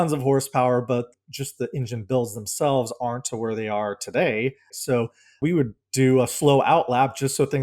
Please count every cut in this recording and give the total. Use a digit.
2